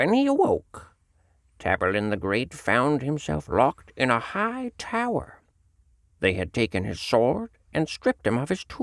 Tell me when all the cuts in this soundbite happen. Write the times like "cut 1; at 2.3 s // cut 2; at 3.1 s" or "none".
cut 1; at 5.9 s